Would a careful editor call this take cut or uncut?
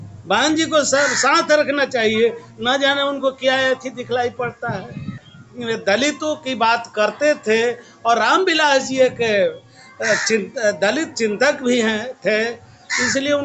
cut